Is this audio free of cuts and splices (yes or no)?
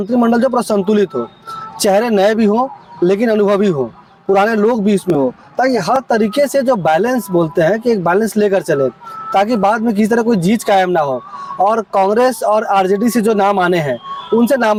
yes